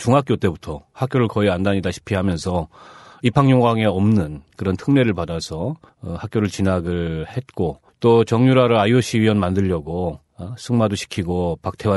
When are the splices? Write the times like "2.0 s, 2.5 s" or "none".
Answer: none

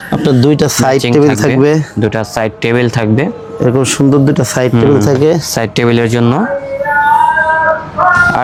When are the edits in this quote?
none

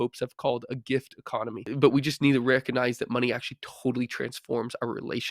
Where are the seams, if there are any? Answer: 1.7 s

